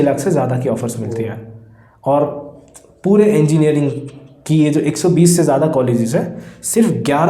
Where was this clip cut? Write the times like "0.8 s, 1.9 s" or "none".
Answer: none